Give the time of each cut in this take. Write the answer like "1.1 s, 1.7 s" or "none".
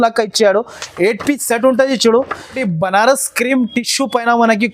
2.7 s